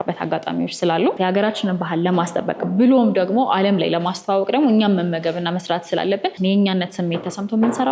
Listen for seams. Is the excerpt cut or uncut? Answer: cut